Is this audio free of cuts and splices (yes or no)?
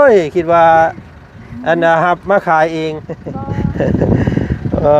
no